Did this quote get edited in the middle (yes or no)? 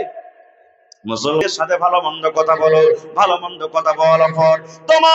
yes